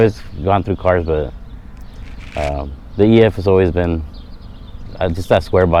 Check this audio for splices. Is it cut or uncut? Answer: uncut